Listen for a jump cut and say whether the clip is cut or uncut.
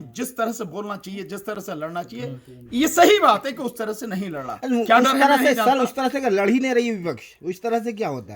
uncut